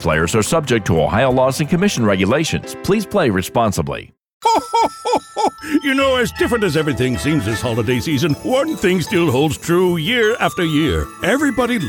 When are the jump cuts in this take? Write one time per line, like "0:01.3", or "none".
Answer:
0:04.4